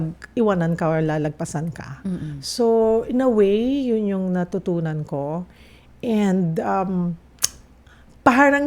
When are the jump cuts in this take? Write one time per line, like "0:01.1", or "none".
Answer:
none

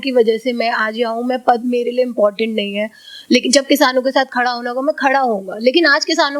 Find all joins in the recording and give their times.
none

